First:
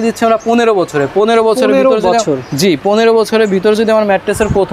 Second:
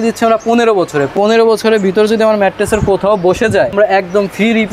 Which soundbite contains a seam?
second; 2 cuts; at 1.1 s, 3.7 s

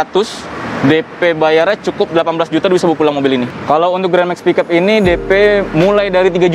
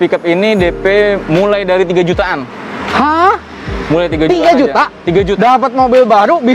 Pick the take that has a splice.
first; 1 cut; at 3.5 s

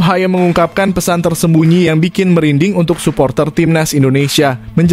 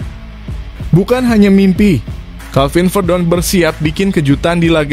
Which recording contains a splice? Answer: second; 1 cut; at 0.9 s

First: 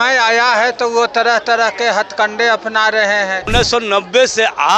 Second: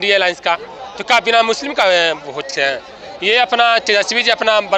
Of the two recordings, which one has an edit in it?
first; 1 cut; at 3.5 s

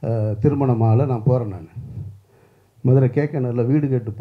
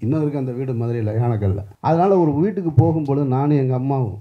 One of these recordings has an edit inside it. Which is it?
second; 1 cut; at 1.7 s

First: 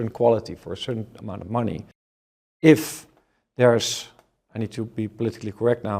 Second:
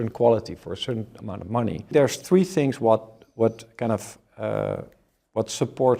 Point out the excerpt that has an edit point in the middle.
second; 1 cut; at 1.9 s

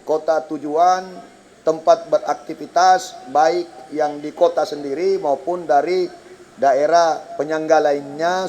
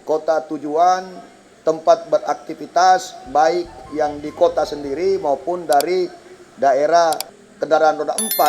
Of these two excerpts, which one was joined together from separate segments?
second; 1 cut; at 7.3 s

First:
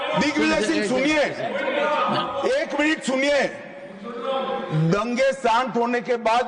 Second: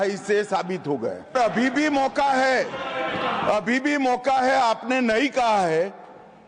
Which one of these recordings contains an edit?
second; 1 cut; at 1.3 s

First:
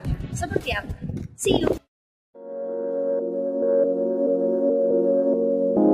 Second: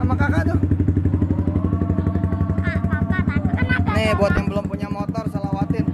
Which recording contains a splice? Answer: first; 1 cut; at 1.9 s

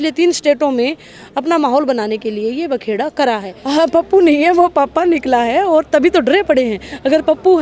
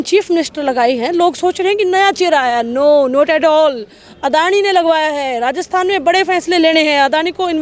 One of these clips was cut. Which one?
first; 1 cut; at 3.5 s

